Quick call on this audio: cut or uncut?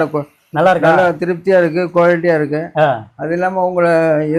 uncut